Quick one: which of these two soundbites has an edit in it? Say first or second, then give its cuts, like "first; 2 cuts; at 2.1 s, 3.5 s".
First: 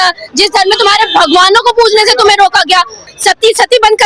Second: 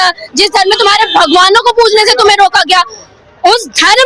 first; 1 cut; at 3.1 s